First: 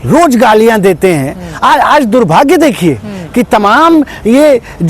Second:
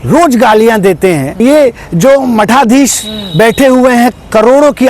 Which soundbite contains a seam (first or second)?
second